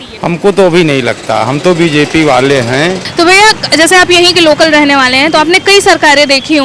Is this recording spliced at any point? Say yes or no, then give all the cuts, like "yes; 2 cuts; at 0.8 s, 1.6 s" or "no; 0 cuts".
no; 0 cuts